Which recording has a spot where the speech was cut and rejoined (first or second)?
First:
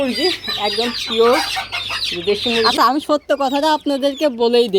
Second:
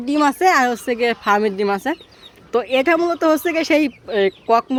first